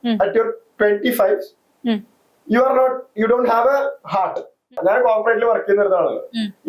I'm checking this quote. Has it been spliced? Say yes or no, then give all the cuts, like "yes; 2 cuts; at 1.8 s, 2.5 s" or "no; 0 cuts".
yes; 1 cut; at 4.8 s